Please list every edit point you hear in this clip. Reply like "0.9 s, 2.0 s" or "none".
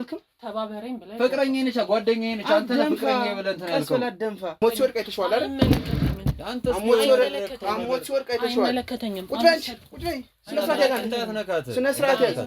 4.6 s